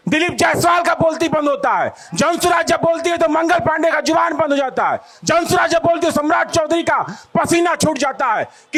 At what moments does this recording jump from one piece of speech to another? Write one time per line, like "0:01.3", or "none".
none